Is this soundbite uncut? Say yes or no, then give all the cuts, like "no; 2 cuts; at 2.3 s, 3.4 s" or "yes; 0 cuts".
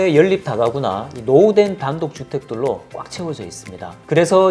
yes; 0 cuts